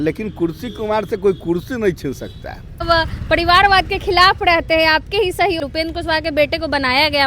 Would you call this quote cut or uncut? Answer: cut